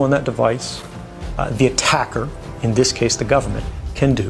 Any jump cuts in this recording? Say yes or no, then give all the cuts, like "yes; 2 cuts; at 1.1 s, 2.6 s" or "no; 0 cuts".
no; 0 cuts